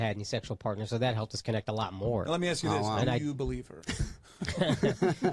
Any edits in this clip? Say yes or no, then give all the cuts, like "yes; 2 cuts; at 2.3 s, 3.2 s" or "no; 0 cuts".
no; 0 cuts